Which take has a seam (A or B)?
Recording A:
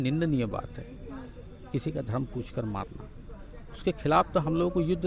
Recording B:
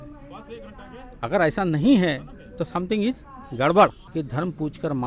B